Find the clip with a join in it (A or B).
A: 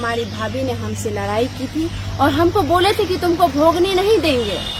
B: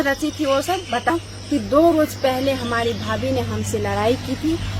B